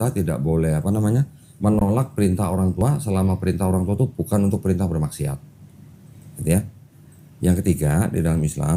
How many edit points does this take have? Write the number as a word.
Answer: zero